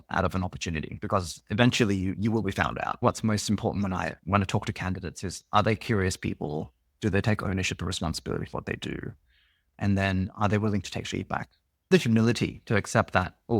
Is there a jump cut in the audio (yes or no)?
yes